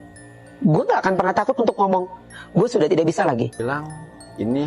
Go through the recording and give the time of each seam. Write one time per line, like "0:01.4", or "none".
0:03.6